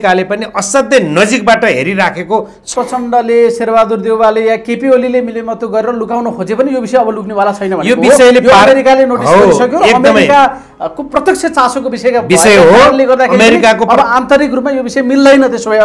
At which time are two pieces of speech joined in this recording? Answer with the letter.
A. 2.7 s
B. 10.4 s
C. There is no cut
A